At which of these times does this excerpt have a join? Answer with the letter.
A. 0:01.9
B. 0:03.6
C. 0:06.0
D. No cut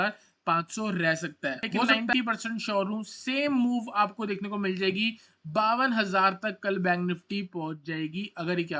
A